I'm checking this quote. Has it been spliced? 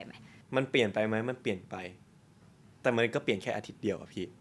no; 0 cuts

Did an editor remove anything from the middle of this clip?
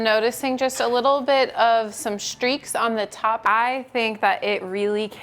yes; 1 cut; at 3.4 s

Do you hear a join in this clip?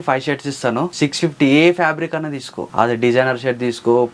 yes; 2 cuts; at 0.9 s, 2.6 s

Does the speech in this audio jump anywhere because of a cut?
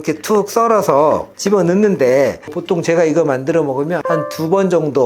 yes; 2 cuts; at 2.5 s, 4.1 s

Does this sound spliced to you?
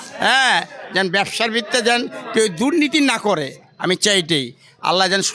no; 0 cuts

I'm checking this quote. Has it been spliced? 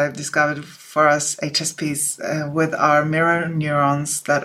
no; 0 cuts

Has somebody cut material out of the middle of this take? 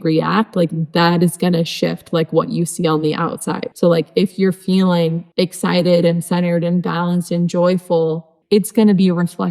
yes; 3 cuts; at 3.6 s, 5.2 s, 8.3 s

